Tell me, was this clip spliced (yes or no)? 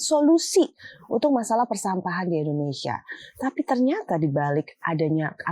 no